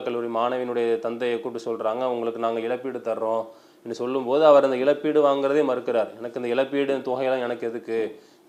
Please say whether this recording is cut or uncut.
uncut